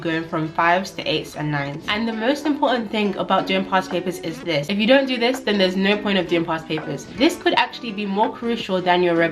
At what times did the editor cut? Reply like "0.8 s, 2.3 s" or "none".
1.8 s, 7.0 s